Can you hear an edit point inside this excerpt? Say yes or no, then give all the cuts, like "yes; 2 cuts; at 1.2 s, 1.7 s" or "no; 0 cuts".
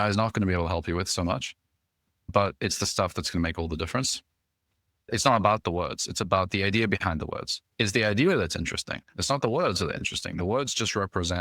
yes; 1 cut; at 5.1 s